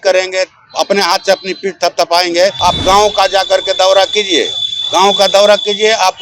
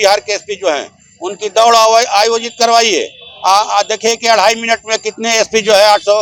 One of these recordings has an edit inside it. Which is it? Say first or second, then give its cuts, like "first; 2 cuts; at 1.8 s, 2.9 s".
first; 1 cut; at 2.6 s